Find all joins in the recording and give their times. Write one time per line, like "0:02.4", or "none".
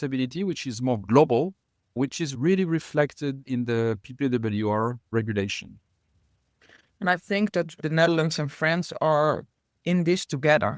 0:02.3
0:07.8